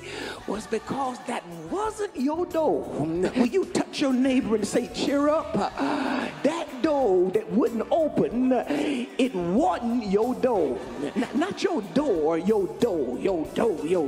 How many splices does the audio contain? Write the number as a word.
three